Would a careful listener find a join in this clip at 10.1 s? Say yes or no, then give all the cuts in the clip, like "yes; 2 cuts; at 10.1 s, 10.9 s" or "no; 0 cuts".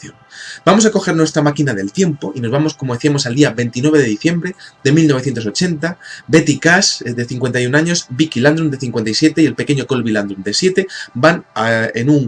no; 1 cut; at 2.3 s